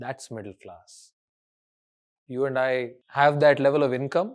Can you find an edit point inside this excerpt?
yes; 1 cut; at 3.0 s

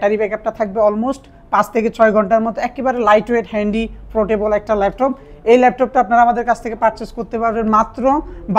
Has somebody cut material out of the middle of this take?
no; 0 cuts

